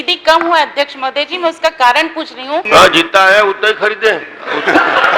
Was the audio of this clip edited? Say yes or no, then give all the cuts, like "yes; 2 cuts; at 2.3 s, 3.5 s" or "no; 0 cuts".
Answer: yes; 1 cut; at 2.6 s